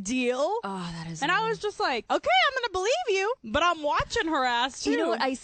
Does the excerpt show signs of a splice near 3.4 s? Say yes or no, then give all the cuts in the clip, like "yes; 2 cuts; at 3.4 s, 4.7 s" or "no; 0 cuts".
yes; 2 cuts; at 2.0 s, 3.4 s